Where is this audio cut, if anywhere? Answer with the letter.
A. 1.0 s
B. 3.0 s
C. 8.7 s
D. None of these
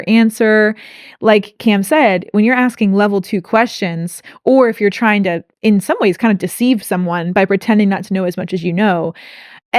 D